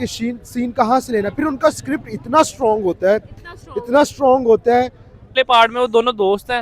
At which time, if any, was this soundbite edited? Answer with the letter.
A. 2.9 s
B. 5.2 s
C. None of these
B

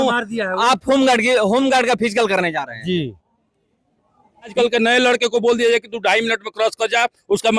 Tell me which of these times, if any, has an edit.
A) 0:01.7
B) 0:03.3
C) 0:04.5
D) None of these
C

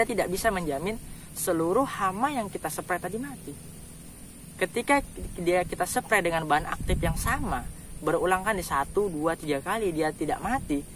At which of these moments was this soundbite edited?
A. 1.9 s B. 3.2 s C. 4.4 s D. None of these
D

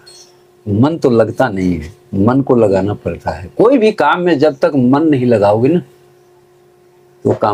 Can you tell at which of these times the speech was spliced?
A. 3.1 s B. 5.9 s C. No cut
C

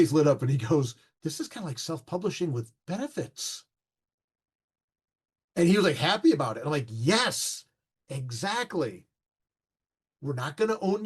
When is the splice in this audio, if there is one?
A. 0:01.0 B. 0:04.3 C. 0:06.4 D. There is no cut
A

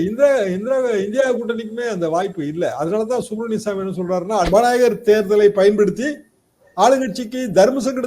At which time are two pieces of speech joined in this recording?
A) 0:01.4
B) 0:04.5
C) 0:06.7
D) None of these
B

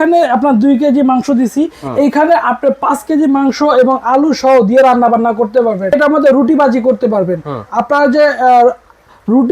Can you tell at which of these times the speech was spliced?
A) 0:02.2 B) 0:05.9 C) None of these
B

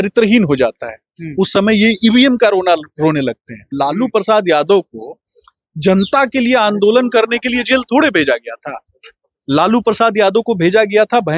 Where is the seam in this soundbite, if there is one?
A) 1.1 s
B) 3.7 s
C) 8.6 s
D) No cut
B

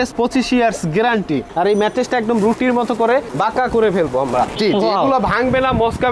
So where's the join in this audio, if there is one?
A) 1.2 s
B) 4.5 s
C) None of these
B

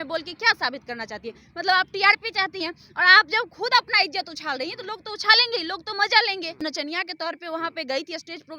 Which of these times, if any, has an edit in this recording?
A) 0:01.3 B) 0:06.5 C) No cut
B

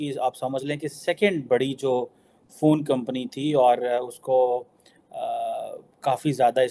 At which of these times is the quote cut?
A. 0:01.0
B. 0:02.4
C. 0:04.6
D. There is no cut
D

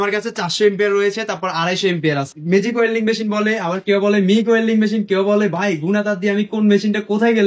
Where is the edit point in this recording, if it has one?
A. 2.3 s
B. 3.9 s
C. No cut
A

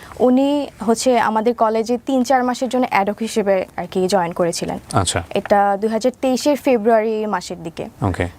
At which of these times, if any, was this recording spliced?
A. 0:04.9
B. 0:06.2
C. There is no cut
C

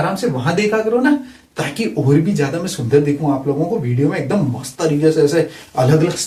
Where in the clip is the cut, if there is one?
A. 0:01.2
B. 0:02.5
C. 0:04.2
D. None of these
D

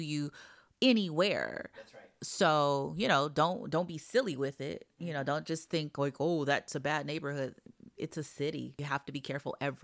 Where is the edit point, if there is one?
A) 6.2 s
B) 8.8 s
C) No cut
B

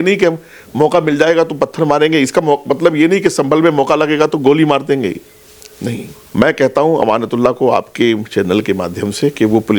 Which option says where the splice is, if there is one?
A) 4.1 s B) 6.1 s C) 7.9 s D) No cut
B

